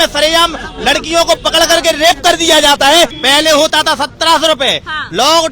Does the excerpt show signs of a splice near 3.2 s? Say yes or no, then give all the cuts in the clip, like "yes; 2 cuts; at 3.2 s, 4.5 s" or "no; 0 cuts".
yes; 1 cut; at 3.2 s